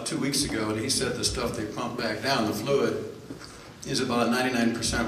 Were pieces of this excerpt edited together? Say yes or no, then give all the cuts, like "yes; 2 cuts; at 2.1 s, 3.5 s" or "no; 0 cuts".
no; 0 cuts